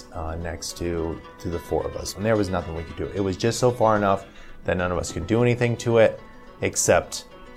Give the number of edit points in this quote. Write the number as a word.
one